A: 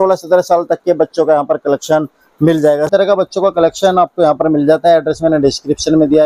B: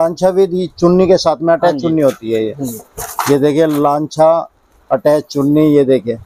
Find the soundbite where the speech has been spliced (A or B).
A